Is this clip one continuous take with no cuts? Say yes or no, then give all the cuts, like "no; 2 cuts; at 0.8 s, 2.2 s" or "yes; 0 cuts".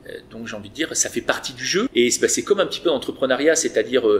no; 1 cut; at 1.9 s